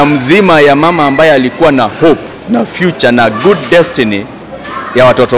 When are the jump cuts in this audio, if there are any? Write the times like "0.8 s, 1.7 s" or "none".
none